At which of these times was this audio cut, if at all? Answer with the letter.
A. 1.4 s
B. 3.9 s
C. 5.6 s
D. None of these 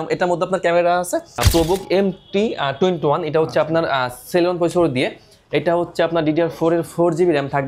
A